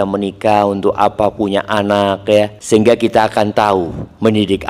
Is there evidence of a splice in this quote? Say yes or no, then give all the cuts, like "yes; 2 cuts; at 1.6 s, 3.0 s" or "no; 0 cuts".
yes; 1 cut; at 2.6 s